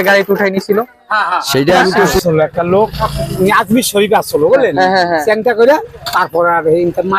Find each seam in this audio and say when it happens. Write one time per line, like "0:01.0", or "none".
0:02.1

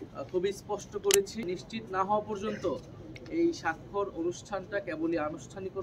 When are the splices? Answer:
0:01.5

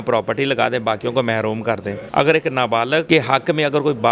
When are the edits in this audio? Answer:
0:02.0
0:03.1

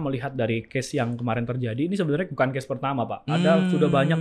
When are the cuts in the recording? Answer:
none

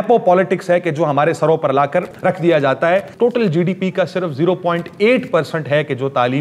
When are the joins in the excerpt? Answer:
0:02.1
0:03.1

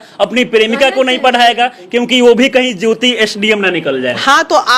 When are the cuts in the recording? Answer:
none

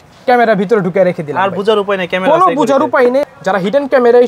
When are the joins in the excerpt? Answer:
0:03.2

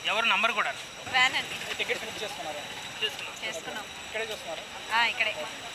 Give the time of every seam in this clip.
none

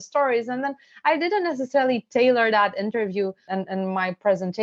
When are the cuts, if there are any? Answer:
0:03.4

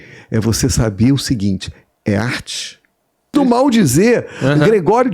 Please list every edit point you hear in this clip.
0:03.3

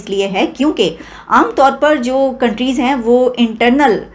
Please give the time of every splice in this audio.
none

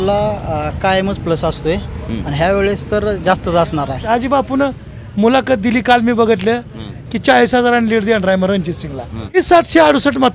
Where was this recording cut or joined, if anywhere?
0:04.1
0:09.4

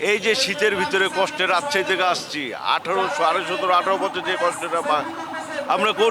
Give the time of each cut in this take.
none

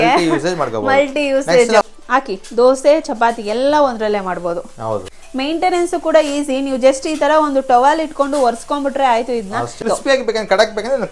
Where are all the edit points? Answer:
0:01.8
0:05.2
0:09.8

